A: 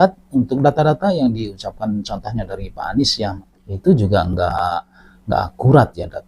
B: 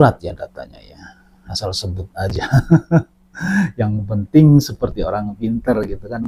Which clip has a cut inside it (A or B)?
A